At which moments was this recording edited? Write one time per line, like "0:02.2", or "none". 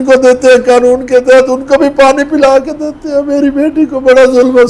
none